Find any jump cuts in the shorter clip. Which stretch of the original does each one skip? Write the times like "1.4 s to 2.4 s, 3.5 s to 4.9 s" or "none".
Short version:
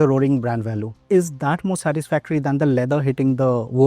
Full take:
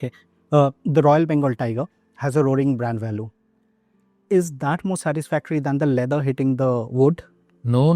3.3 s to 4.1 s